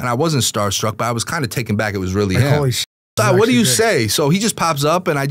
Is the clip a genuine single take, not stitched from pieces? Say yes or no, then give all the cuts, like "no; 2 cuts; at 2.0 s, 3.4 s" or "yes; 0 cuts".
yes; 0 cuts